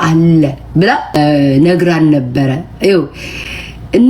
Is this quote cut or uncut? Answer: cut